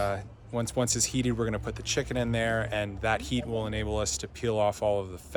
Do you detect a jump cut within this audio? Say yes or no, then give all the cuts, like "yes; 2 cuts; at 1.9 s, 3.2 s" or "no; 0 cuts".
no; 0 cuts